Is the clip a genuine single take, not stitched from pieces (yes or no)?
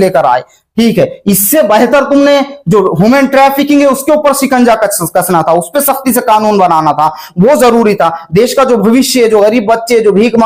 yes